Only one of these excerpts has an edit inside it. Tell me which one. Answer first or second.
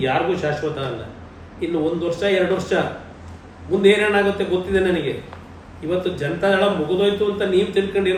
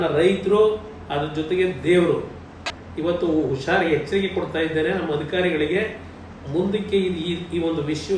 second